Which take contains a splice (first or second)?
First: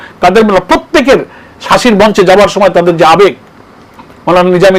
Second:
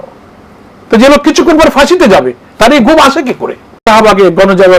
second